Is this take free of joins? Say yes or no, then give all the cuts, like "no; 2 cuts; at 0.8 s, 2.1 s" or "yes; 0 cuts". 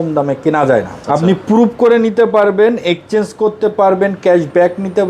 no; 1 cut; at 1.0 s